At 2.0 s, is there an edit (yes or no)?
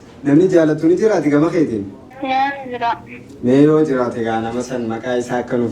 yes